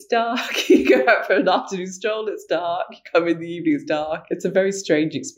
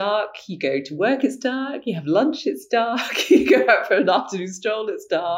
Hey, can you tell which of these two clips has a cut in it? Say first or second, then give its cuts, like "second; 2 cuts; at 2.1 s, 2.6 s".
first; 1 cut; at 4.2 s